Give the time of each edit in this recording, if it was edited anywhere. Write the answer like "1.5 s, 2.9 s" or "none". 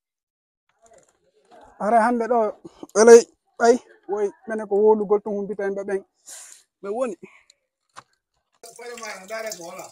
8.7 s